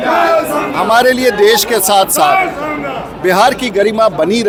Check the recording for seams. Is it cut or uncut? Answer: uncut